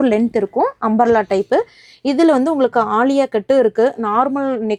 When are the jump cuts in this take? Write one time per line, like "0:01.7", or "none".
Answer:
none